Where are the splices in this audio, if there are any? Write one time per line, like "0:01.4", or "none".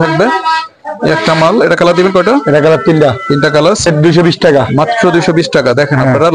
0:03.9